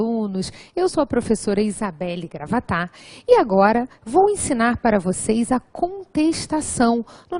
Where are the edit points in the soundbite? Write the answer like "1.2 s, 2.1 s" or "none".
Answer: none